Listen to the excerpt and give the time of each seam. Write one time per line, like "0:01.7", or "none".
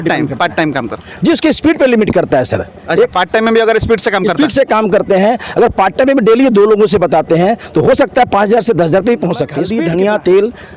0:09.6